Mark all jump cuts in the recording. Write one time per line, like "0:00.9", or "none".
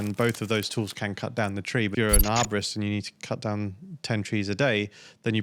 0:01.9